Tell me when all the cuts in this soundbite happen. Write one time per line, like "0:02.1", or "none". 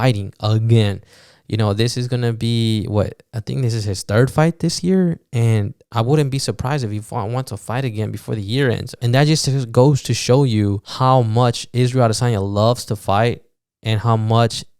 0:05.9
0:08.9
0:10.9